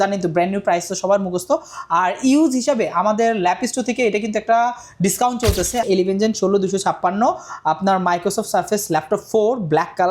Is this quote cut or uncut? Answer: cut